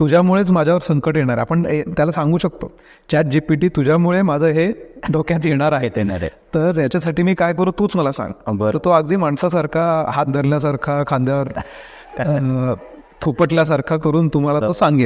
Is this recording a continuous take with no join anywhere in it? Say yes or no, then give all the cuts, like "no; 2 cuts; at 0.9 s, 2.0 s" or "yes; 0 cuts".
yes; 0 cuts